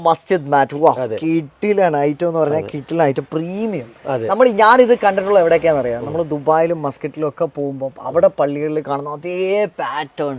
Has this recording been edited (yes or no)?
no